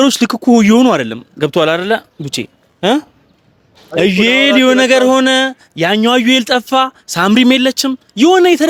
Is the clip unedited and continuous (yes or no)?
yes